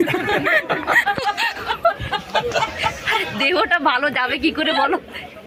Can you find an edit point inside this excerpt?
no; 0 cuts

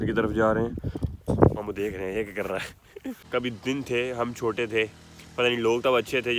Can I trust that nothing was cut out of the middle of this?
no; 2 cuts; at 1.3 s, 3.2 s

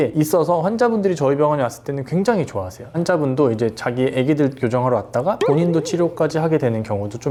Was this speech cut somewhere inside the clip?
no; 0 cuts

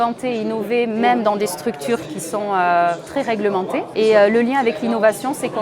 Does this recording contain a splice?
yes; 2 cuts; at 2.1 s, 3.9 s

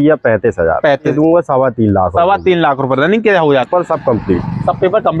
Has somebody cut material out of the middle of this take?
yes; 2 cuts; at 1.1 s, 3.7 s

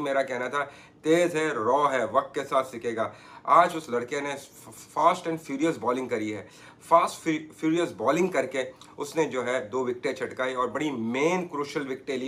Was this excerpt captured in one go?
yes; 0 cuts

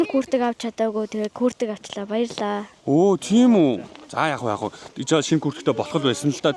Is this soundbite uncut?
yes; 0 cuts

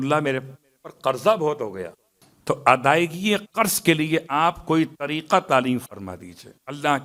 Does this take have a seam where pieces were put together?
no; 0 cuts

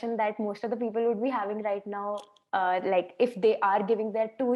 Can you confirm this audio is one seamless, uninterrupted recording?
yes; 0 cuts

